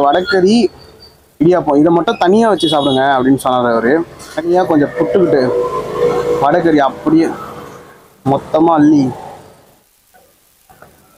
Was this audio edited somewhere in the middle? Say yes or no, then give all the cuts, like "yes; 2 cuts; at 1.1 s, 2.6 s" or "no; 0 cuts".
yes; 2 cuts; at 4.5 s, 9.9 s